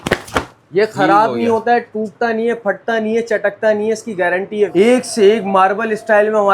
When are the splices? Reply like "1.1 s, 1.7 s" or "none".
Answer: 4.7 s